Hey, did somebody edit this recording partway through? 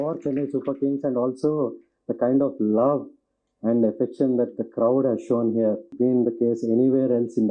yes; 1 cut; at 5.9 s

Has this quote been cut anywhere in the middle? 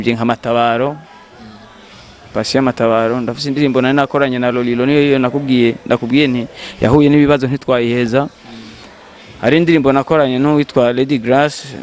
no; 0 cuts

